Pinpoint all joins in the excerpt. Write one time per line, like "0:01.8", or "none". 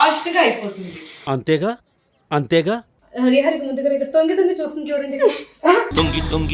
0:02.9